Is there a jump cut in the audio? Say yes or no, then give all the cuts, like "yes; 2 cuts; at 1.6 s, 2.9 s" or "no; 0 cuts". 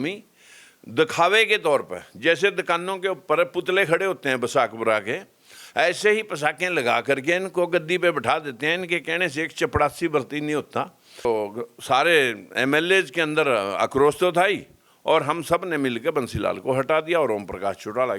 yes; 1 cut; at 11.2 s